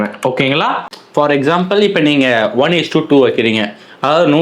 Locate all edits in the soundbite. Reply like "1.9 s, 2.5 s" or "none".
0.9 s